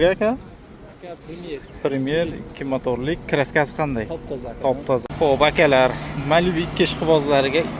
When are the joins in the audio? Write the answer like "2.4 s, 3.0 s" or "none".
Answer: 5.0 s